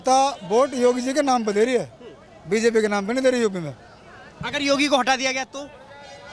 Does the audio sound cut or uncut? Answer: uncut